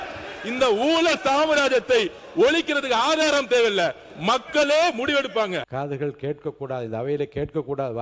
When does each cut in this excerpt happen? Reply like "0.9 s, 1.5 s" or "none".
5.7 s